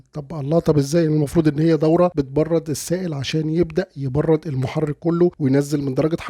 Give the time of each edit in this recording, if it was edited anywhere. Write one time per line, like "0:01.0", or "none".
0:02.1
0:05.4